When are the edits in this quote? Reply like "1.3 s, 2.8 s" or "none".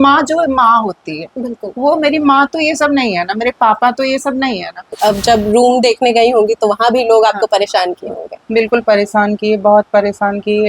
4.8 s